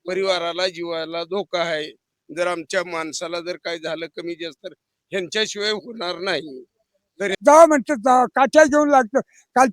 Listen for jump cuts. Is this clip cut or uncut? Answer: cut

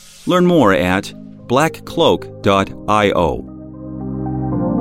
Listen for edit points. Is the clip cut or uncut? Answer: cut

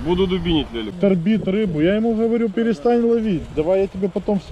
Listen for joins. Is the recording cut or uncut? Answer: cut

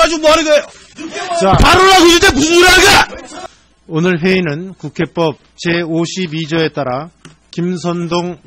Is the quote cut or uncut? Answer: cut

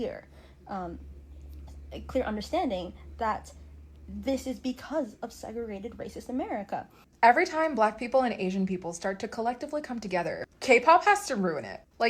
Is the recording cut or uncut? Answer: cut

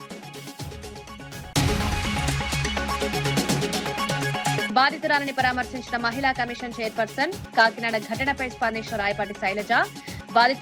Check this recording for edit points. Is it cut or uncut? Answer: cut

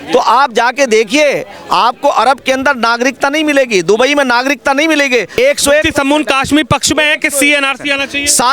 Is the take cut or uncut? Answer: cut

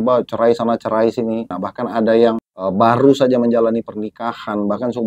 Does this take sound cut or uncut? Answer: cut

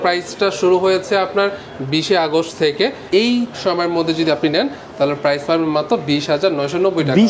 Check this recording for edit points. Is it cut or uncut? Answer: cut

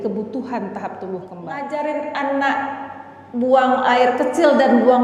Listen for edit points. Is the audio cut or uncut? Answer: cut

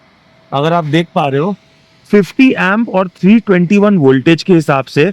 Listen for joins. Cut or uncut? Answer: uncut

